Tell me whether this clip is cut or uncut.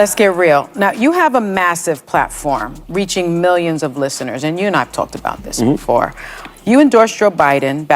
cut